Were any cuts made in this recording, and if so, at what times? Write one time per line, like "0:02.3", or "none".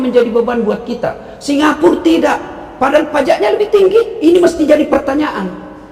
0:04.1